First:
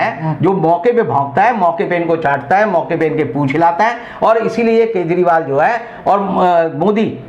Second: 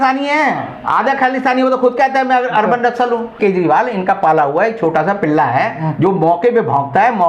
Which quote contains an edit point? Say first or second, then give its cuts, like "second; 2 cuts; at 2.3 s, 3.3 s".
second; 1 cut; at 3.4 s